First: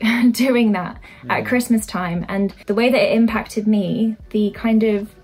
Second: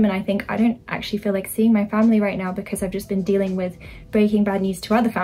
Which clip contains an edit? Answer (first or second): first